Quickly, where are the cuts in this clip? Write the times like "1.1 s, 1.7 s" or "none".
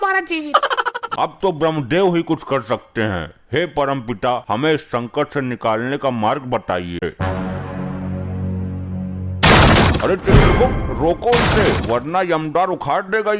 1.0 s, 7.1 s

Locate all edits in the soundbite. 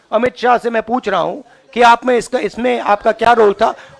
none

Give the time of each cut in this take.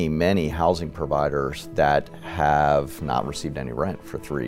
none

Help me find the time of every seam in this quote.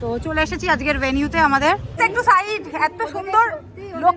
2.0 s

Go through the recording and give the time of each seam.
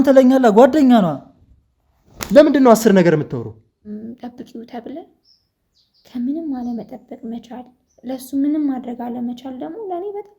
3.9 s

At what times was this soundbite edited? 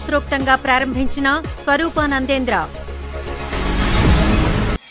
3.9 s

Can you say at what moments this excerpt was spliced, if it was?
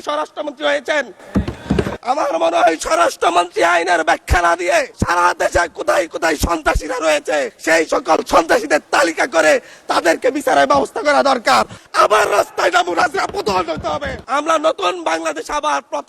2.0 s, 4.9 s, 7.5 s, 11.8 s, 14.2 s

